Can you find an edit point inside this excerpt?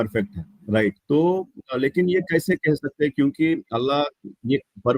yes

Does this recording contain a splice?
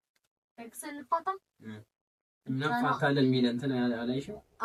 no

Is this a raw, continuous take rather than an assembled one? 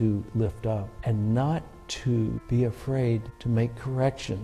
no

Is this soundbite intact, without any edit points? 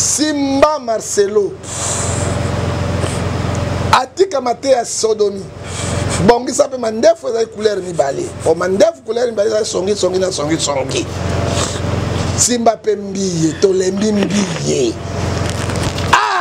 yes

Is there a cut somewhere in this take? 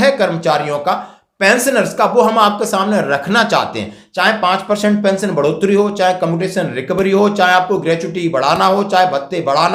no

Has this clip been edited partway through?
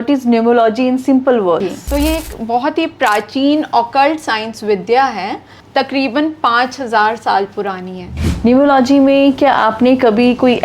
yes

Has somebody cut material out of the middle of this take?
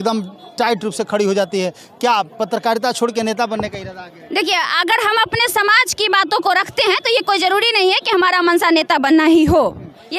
no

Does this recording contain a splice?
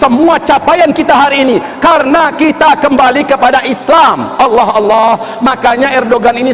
no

